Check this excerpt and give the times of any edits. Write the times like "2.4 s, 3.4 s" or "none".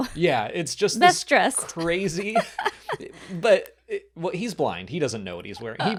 none